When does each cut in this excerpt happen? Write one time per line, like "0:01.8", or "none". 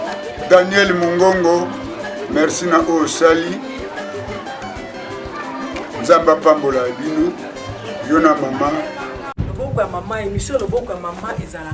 0:09.3